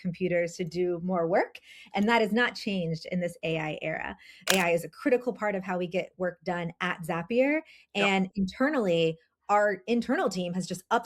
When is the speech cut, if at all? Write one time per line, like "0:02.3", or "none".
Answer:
0:04.4